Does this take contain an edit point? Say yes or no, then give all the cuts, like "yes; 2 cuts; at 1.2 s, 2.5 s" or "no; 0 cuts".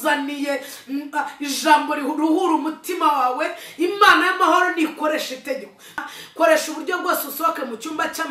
yes; 1 cut; at 6.0 s